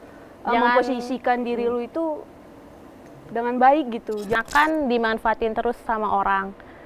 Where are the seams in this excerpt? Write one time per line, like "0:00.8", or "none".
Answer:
0:04.4